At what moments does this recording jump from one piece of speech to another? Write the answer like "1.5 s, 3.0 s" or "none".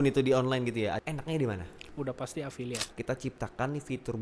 1.0 s, 1.9 s, 2.9 s